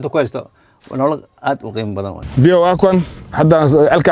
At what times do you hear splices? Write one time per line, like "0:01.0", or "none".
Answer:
0:02.2